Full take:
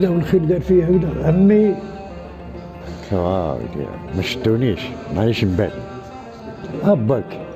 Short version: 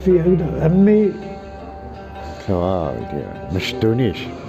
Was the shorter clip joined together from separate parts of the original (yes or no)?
no